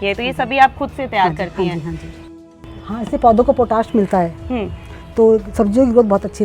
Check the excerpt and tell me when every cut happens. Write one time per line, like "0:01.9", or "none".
0:02.3